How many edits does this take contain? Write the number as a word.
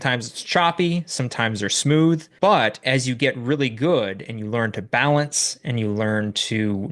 one